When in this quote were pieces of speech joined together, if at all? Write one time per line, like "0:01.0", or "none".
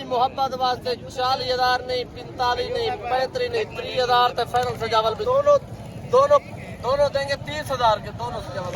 0:05.2